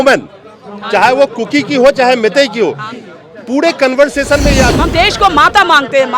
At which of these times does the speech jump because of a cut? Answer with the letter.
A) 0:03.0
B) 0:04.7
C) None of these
B